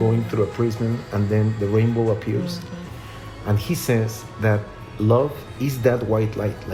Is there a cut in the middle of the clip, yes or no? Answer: no